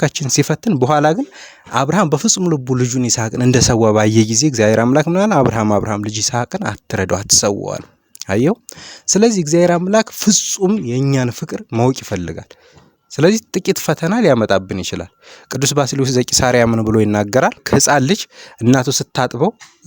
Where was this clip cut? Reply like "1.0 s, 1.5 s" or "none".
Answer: 17.6 s